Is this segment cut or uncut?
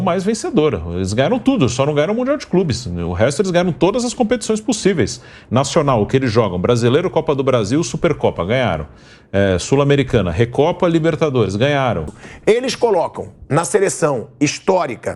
cut